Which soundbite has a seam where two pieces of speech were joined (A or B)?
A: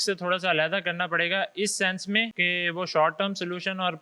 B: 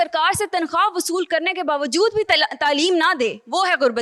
A